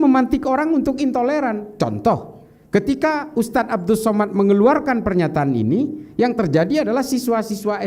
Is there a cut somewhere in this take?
no; 0 cuts

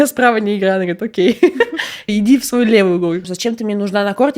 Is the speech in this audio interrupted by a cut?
yes; 2 cuts; at 2.1 s, 3.3 s

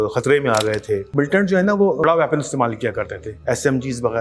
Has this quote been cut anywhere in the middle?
yes; 3 cuts; at 1.1 s, 2.0 s, 3.3 s

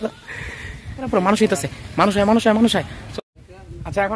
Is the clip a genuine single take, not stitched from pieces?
no; 1 cut; at 1.1 s

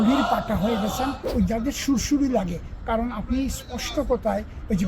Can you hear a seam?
yes; 1 cut; at 1.3 s

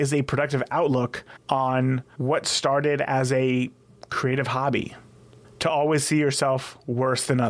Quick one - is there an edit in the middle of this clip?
yes; 2 cuts; at 1.3 s, 2.1 s

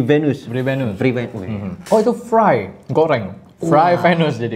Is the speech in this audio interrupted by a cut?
no; 0 cuts

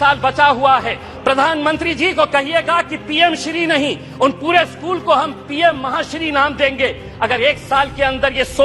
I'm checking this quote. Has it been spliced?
yes; 1 cut; at 1.1 s

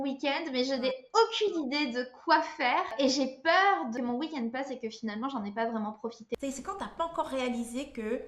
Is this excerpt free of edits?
no; 3 cuts; at 2.9 s, 3.9 s, 6.4 s

